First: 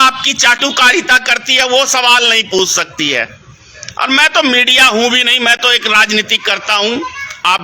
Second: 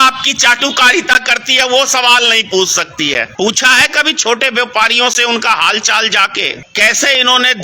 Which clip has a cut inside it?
second; 2 cuts; at 3.3 s, 6.6 s

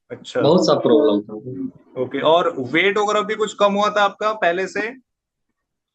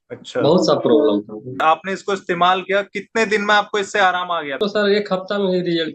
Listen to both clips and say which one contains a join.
second; 2 cuts; at 1.6 s, 4.6 s

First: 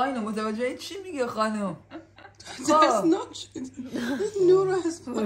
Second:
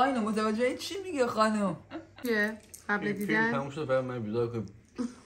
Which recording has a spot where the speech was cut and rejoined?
second; 1 cut; at 2.2 s

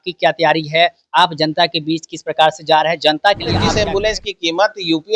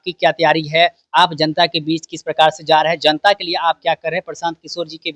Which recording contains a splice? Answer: first; 1 cut; at 3.7 s

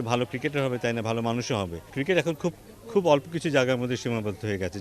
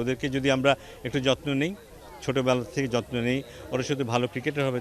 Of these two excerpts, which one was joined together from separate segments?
first; 1 cut; at 1.9 s

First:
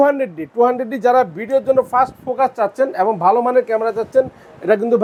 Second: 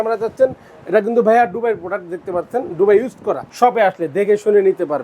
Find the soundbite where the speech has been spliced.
second; 1 cut; at 3.5 s

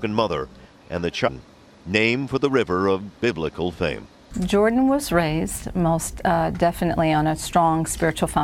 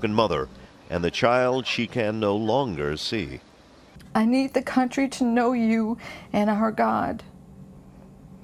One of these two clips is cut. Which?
second; 1 cut; at 1.3 s

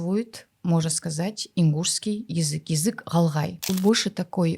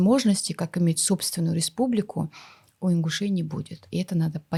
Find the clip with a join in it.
first; 1 cut; at 3.6 s

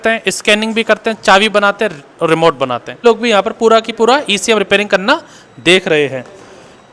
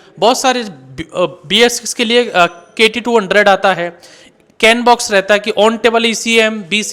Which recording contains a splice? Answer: first; 1 cut; at 3.0 s

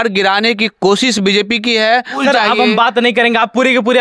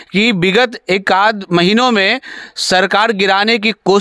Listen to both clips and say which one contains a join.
first; 1 cut; at 2.2 s

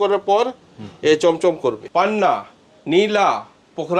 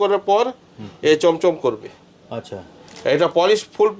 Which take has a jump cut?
first; 1 cut; at 1.8 s

